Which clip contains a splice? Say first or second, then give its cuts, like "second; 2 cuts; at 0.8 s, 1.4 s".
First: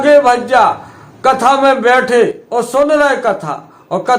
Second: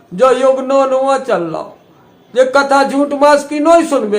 first; 1 cut; at 2.4 s